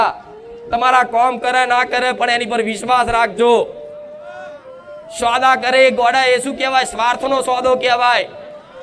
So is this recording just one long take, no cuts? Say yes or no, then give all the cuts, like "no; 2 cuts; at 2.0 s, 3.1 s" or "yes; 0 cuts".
no; 2 cuts; at 3.7 s, 5.1 s